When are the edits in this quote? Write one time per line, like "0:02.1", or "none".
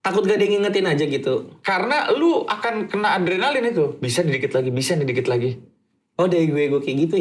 none